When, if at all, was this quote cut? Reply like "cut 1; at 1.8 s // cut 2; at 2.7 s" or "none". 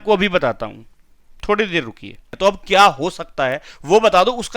cut 1; at 2.2 s

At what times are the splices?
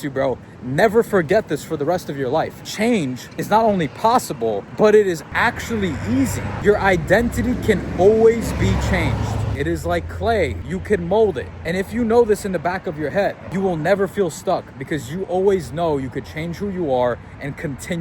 cut 1; at 2.9 s // cut 2; at 4.7 s // cut 3; at 5.2 s // cut 4; at 6.5 s // cut 5; at 9.5 s // cut 6; at 10.7 s // cut 7; at 11.5 s // cut 8; at 13.4 s

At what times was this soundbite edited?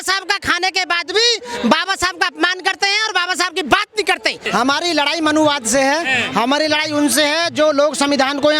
cut 1; at 4.4 s

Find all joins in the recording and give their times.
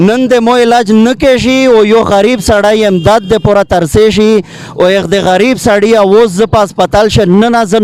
none

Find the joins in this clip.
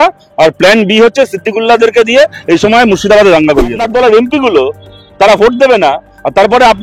cut 1; at 3.8 s

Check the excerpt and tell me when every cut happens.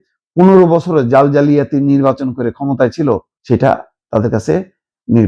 cut 1; at 3.3 s

